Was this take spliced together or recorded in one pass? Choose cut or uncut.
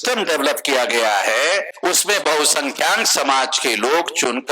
cut